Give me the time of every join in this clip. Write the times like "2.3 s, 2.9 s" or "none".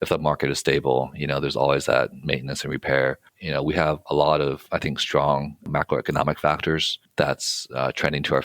5.7 s